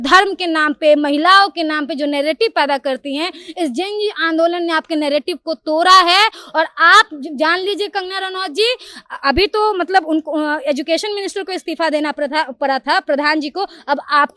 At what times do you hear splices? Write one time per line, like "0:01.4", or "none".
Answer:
none